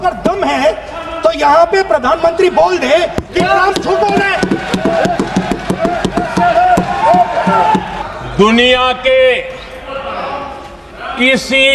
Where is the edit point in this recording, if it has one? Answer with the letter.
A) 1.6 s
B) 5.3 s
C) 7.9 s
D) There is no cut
C